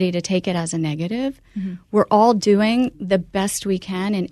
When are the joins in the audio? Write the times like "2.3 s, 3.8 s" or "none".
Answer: none

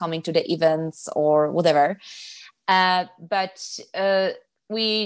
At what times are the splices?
none

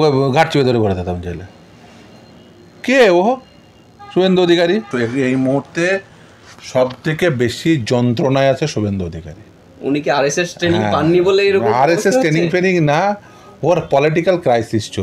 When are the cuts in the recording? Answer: 4.9 s

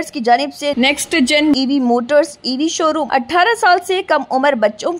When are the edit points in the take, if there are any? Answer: 3.0 s

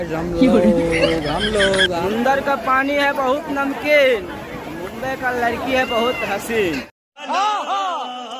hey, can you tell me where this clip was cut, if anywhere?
none

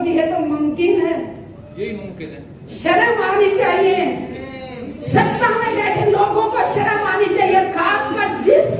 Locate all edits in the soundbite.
none

